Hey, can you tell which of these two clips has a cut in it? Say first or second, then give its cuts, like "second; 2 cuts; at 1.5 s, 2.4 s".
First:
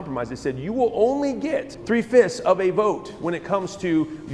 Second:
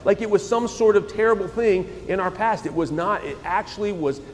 first; 1 cut; at 1.7 s